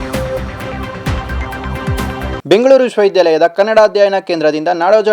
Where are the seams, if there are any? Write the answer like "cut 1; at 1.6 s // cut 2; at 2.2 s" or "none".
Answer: none